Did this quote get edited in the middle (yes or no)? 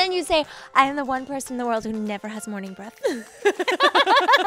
no